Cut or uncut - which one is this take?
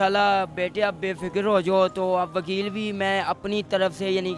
uncut